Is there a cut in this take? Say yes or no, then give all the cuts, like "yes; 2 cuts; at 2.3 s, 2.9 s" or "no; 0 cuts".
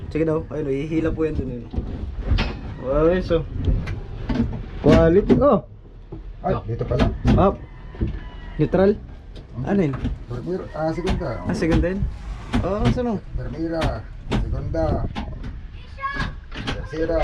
no; 0 cuts